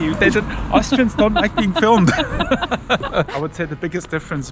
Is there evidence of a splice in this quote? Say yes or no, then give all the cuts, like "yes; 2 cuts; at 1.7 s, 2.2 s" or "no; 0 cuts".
yes; 1 cut; at 3.3 s